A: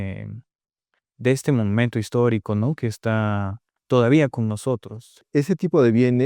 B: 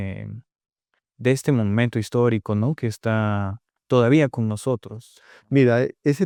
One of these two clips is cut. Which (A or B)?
A